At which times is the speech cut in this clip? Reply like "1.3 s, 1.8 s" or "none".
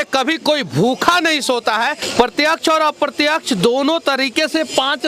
2.0 s